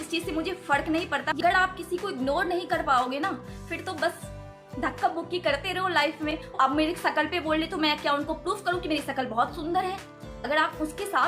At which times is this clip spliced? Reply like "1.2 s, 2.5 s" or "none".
1.4 s, 6.5 s, 10.3 s